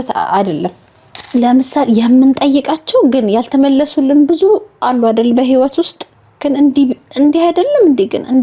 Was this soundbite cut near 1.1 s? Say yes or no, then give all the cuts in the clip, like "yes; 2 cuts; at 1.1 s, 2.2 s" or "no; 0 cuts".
yes; 1 cut; at 1.1 s